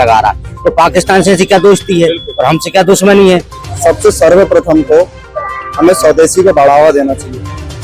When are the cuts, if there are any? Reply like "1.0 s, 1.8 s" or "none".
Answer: 3.6 s